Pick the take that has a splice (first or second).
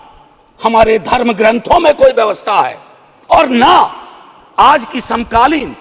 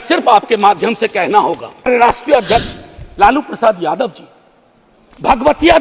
second